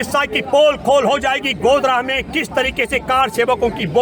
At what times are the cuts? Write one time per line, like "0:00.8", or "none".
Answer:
none